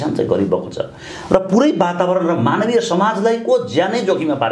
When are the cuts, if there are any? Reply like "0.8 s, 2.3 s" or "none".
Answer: none